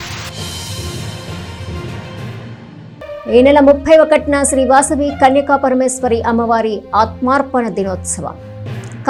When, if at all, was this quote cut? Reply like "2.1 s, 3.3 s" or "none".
none